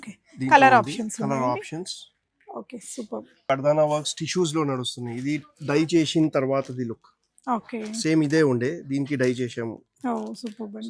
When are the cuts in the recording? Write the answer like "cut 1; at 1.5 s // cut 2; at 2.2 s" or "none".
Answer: cut 1; at 3.5 s